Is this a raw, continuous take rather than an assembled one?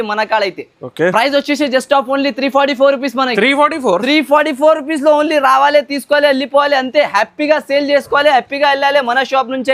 yes; 0 cuts

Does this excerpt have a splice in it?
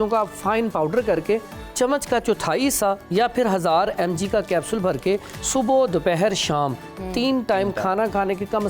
no; 0 cuts

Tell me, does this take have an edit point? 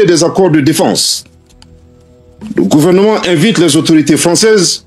no; 0 cuts

